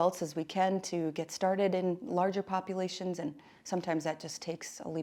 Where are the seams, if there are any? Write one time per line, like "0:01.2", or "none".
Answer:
none